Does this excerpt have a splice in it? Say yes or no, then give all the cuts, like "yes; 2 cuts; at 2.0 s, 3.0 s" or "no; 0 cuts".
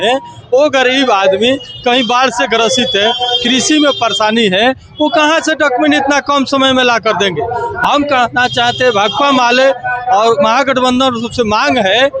no; 0 cuts